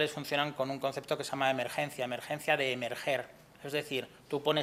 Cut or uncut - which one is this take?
uncut